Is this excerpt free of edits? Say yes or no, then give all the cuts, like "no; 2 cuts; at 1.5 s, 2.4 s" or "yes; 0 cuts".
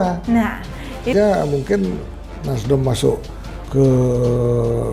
no; 1 cut; at 1.1 s